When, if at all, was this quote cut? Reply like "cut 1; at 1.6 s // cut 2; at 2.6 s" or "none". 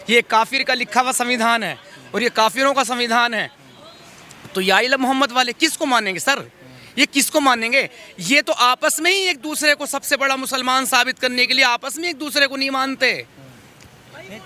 none